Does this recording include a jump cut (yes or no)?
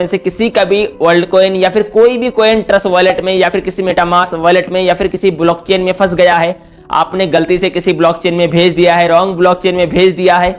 no